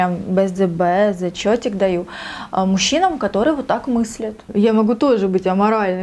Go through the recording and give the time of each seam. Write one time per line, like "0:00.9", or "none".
0:04.4